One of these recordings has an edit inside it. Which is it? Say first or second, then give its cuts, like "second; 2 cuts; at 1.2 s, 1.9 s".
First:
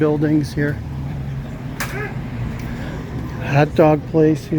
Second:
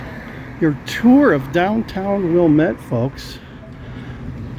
first; 1 cut; at 1.5 s